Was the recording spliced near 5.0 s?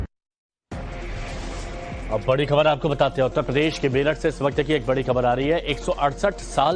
no; 0 cuts

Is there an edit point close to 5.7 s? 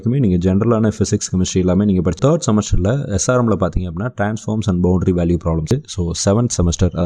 yes; 2 cuts; at 2.2 s, 5.7 s

